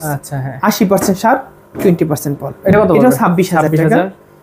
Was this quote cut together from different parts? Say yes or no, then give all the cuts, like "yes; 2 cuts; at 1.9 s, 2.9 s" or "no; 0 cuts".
no; 0 cuts